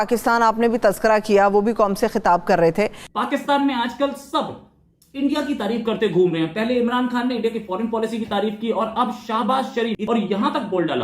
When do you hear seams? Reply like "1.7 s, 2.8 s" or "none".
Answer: 3.1 s, 10.0 s